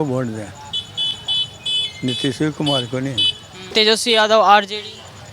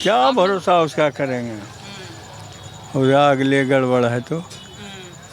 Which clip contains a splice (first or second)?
first